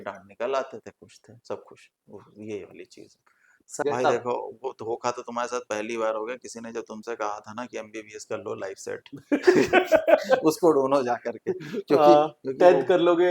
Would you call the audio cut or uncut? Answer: cut